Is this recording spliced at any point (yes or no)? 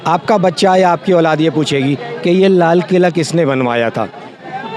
no